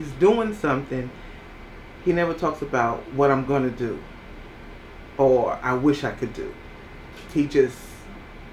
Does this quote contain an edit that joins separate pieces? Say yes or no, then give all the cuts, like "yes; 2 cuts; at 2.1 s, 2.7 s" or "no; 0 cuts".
no; 0 cuts